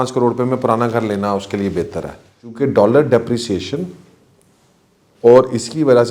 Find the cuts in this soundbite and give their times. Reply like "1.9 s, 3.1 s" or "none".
2.5 s

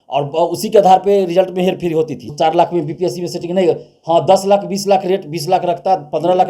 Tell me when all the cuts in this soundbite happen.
2.2 s

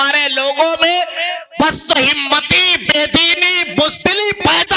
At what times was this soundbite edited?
none

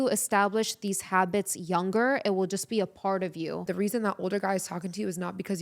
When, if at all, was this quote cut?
3.7 s

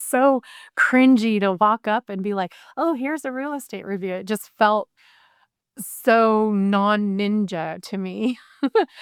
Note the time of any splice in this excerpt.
none

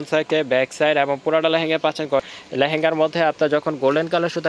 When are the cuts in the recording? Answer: 2.2 s

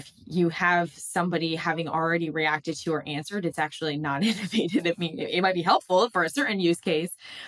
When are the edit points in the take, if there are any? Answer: none

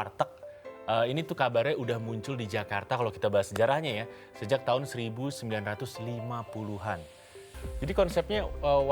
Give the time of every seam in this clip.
7.6 s

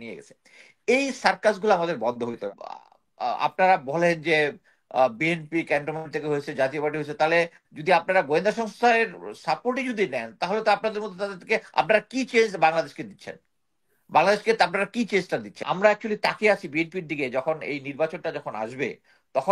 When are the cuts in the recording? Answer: 2.5 s, 15.6 s

